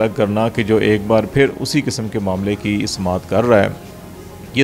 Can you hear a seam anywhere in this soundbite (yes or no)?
no